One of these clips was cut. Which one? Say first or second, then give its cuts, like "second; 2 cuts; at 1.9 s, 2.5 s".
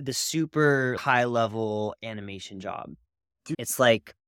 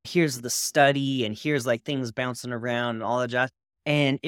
first; 2 cuts; at 1.0 s, 3.4 s